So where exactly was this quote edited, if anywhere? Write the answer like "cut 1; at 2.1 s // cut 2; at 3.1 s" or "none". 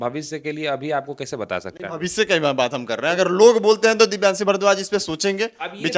none